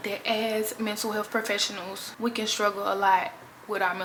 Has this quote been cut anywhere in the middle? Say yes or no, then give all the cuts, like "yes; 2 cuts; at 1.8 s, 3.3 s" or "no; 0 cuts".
no; 0 cuts